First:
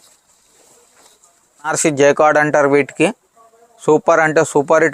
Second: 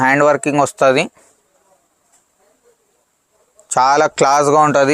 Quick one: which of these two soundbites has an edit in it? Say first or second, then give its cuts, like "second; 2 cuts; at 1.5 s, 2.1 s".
first; 1 cut; at 1.8 s